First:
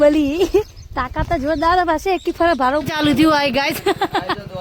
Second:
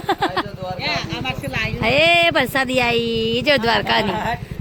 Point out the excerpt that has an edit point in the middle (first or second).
first